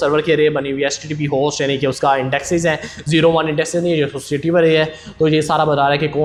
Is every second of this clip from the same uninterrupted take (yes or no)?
yes